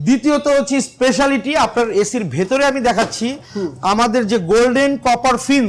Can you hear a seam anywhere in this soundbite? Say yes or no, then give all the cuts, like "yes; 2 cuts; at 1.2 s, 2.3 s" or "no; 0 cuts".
no; 0 cuts